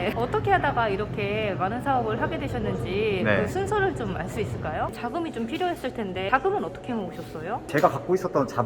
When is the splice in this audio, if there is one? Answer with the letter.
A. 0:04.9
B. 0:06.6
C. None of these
A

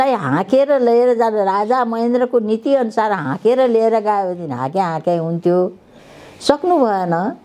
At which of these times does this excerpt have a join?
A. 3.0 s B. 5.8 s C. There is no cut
C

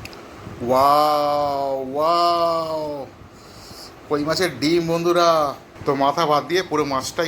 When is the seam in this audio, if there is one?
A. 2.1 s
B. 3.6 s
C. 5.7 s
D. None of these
C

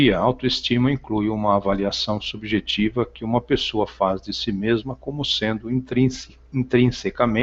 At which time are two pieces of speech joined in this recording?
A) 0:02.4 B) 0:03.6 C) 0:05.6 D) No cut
A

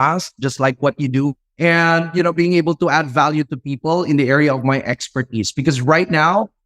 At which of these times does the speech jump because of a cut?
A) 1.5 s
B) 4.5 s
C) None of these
A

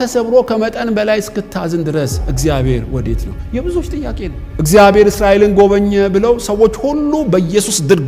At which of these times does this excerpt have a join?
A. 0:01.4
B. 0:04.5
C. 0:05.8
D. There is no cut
B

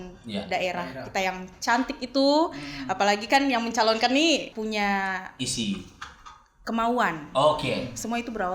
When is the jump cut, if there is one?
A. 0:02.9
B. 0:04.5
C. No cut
B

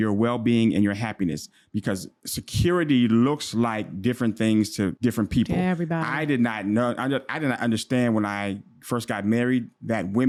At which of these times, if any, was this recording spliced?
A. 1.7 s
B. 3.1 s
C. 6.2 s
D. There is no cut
D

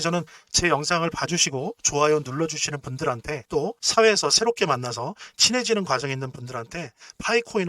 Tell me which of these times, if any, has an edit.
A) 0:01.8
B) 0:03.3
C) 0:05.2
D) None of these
B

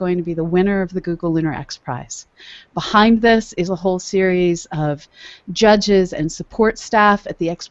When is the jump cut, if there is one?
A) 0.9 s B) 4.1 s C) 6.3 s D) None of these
B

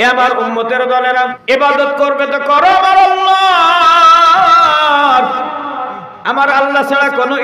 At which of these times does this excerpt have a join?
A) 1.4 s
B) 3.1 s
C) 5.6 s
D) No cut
A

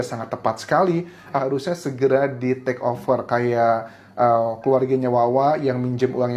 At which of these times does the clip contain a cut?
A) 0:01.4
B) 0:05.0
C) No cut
A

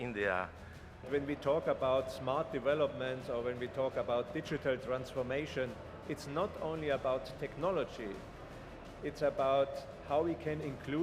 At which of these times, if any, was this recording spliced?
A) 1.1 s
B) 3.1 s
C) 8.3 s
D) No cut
A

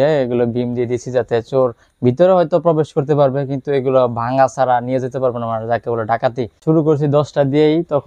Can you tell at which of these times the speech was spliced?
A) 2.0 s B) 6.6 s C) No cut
B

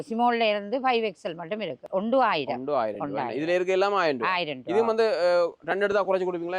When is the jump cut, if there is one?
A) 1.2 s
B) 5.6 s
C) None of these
C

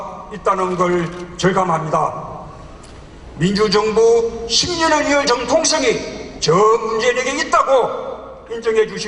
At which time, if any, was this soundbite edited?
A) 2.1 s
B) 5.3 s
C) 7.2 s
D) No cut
C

